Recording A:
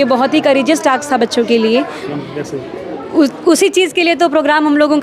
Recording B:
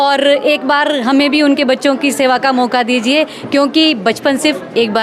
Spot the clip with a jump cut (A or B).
A